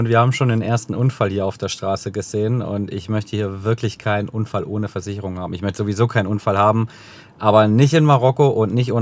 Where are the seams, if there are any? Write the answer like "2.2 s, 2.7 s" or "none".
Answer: none